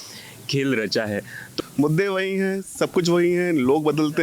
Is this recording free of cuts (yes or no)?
no